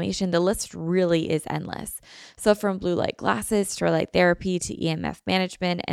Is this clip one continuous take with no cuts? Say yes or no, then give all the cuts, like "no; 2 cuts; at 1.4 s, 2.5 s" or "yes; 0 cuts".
yes; 0 cuts